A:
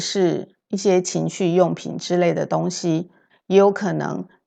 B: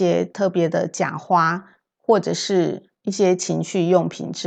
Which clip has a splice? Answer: A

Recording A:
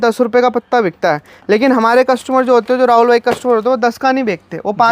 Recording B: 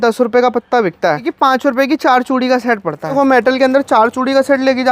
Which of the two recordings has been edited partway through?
B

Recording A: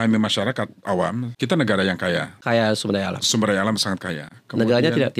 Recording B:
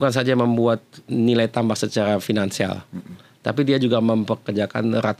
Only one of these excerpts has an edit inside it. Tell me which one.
A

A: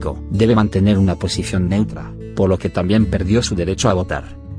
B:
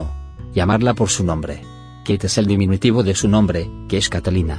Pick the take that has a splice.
B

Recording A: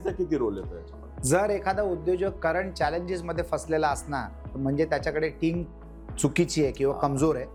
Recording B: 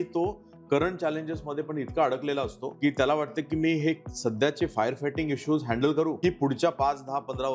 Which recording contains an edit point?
B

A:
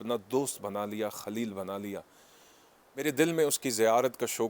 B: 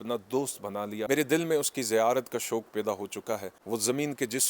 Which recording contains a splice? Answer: B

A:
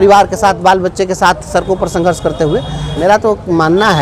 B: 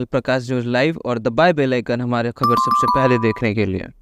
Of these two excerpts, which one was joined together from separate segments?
A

